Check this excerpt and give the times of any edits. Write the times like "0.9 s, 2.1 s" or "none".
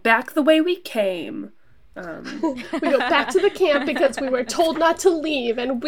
none